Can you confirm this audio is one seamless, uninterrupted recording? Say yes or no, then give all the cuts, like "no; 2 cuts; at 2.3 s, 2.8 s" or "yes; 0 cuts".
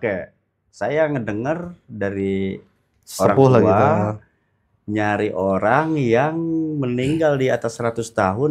yes; 0 cuts